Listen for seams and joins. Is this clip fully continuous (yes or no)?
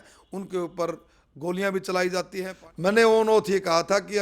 no